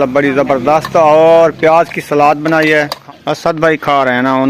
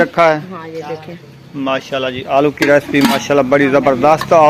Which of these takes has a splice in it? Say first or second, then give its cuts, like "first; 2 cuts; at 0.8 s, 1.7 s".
first; 1 cut; at 3.0 s